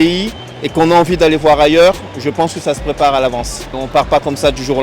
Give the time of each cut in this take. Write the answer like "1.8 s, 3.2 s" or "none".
3.7 s